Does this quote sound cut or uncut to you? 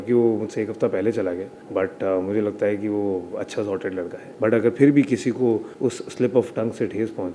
cut